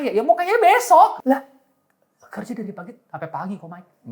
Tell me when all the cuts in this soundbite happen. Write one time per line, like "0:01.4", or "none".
0:01.2

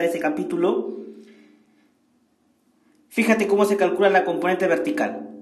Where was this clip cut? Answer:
0:03.9

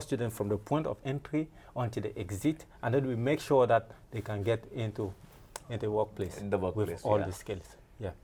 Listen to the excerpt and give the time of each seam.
none

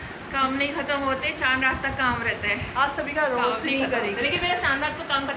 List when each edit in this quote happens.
none

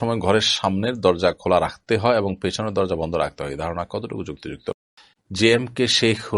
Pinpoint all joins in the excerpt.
0:04.7

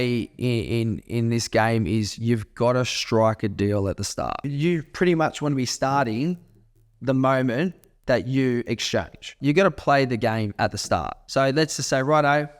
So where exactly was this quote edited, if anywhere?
0:04.4
0:09.3
0:11.2

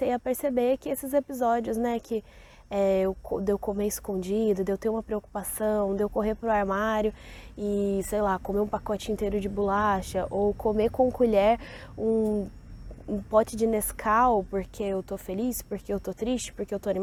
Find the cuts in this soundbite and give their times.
none

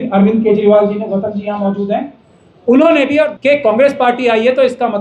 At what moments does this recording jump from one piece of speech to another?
0:03.3

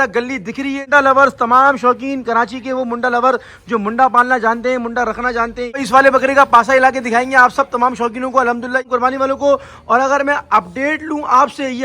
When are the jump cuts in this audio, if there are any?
0:00.8
0:05.8
0:08.9

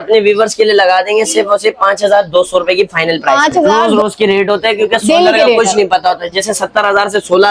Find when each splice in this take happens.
0:03.8

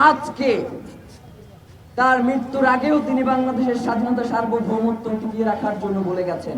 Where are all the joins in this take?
none

